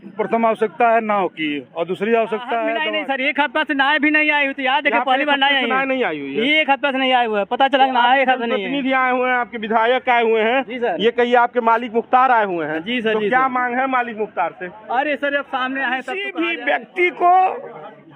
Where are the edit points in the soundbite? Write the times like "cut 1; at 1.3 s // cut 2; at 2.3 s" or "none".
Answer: cut 1; at 2.9 s // cut 2; at 16.3 s